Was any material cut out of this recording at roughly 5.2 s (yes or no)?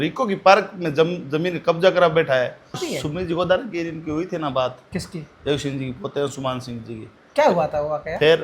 no